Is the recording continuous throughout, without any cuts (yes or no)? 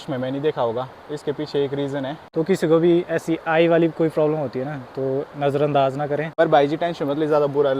no